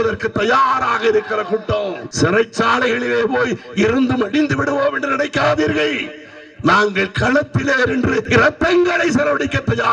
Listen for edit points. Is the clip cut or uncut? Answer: cut